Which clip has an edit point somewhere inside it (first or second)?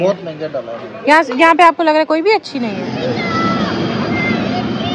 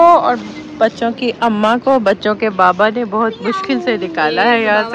first